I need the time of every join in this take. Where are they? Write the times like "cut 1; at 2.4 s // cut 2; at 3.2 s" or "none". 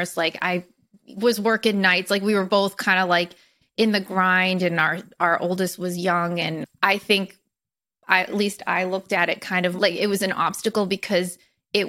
cut 1; at 6.7 s // cut 2; at 9.8 s